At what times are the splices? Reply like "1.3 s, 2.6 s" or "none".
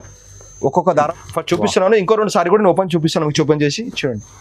1.1 s